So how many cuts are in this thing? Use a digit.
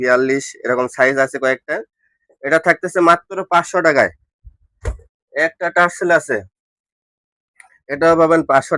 0